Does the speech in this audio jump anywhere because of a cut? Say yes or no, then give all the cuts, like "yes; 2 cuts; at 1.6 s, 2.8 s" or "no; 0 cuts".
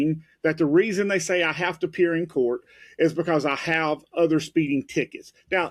no; 0 cuts